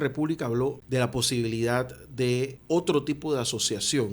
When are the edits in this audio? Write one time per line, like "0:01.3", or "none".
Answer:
0:00.8
0:02.6